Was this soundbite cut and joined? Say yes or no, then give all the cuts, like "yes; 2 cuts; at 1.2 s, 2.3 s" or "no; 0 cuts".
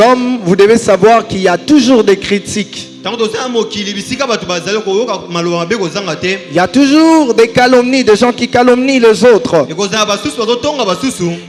no; 0 cuts